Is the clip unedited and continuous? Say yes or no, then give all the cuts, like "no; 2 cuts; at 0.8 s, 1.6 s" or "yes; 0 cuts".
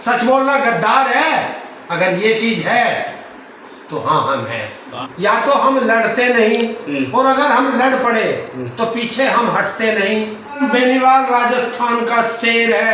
no; 2 cuts; at 5.0 s, 10.6 s